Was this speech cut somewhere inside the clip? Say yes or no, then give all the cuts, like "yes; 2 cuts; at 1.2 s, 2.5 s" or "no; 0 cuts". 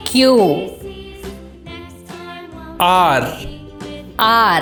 no; 0 cuts